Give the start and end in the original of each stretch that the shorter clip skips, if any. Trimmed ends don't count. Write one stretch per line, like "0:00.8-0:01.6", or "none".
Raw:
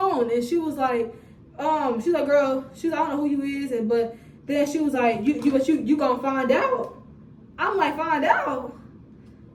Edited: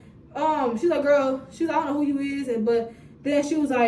none